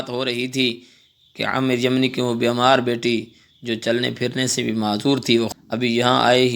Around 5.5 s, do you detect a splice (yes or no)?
yes